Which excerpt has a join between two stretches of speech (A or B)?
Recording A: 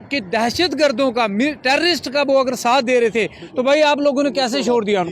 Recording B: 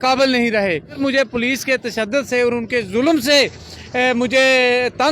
B